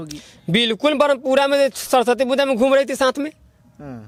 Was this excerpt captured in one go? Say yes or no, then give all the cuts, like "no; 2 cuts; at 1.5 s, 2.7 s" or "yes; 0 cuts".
yes; 0 cuts